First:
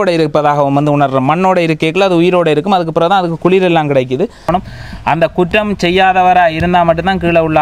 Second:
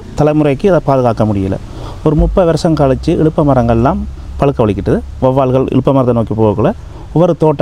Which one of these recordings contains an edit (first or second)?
first